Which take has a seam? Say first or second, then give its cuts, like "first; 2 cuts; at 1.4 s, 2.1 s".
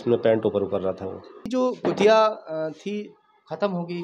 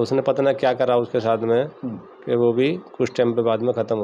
first; 1 cut; at 1.5 s